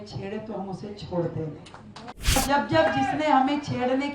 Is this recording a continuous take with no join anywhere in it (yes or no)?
no